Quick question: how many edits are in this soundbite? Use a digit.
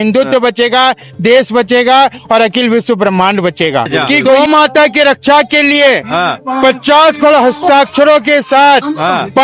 1